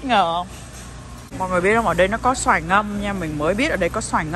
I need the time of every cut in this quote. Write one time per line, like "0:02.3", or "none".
0:01.4